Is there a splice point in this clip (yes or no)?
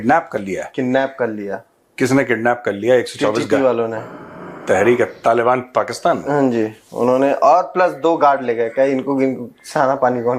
no